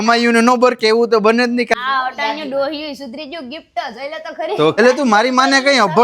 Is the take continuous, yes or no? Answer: no